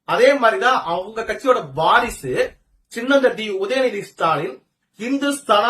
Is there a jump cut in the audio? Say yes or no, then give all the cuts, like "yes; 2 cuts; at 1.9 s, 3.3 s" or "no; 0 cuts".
no; 0 cuts